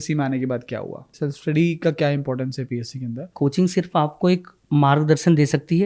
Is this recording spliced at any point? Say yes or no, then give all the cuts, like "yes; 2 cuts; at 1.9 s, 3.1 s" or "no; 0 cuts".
yes; 2 cuts; at 1.1 s, 3.3 s